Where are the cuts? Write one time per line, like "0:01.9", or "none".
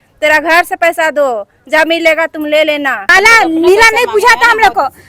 0:03.0